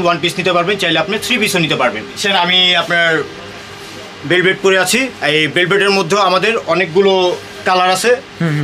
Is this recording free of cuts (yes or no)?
no